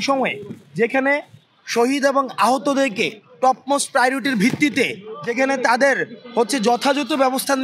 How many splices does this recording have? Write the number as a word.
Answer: zero